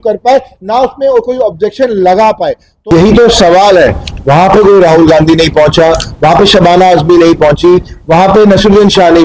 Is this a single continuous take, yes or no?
no